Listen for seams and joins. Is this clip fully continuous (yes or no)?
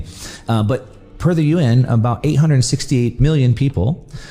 no